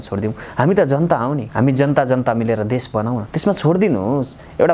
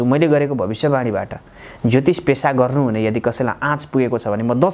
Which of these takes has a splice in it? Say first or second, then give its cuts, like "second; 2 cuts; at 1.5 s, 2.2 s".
first; 2 cuts; at 1.5 s, 3.3 s